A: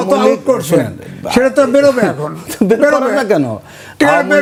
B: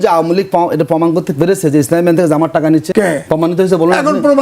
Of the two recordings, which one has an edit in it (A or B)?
B